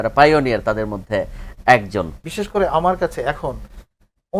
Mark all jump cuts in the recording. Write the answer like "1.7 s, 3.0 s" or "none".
2.3 s